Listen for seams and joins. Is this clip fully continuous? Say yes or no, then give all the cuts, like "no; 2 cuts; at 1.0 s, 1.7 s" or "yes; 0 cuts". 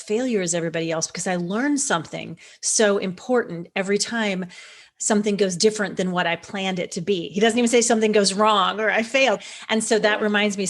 no; 1 cut; at 9.4 s